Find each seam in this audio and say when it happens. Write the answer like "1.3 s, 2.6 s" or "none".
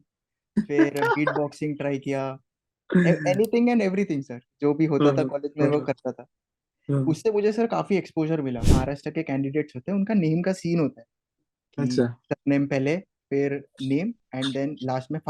8.7 s